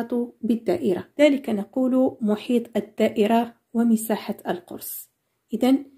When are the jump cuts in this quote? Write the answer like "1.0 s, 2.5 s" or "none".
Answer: 1.1 s